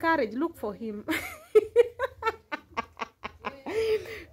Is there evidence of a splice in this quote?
no; 0 cuts

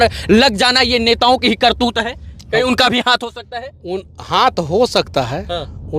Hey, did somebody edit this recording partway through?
no; 0 cuts

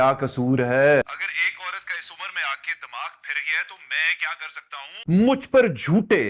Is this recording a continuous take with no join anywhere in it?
yes; 0 cuts

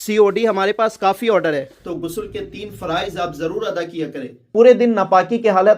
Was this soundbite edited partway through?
yes; 2 cuts; at 1.8 s, 4.5 s

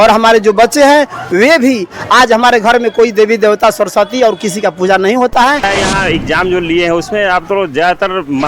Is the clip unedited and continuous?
no; 1 cut; at 5.6 s

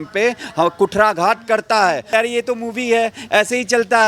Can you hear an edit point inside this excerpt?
yes; 1 cut; at 2.1 s

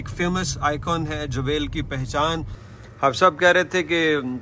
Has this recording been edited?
yes; 1 cut; at 2.5 s

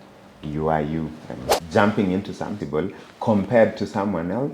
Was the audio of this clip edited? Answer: yes; 2 cuts; at 1.5 s, 2.6 s

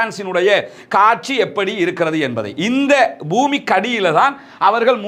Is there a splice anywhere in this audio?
no; 0 cuts

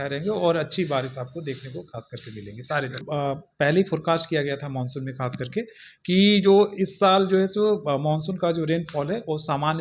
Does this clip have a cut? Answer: yes; 1 cut; at 3.1 s

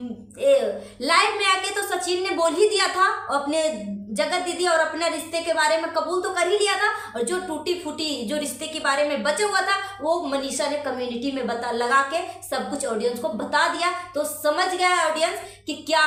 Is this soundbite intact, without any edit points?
yes; 0 cuts

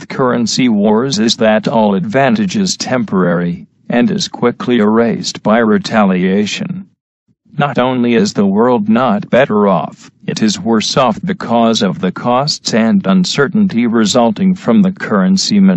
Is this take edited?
yes; 1 cut; at 6.6 s

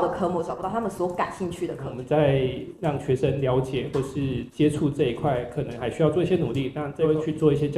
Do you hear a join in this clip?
yes; 2 cuts; at 1.9 s, 6.9 s

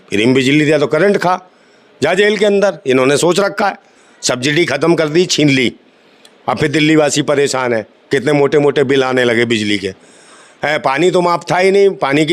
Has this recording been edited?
no; 0 cuts

